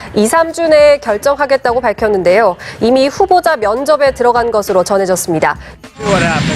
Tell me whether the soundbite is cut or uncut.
uncut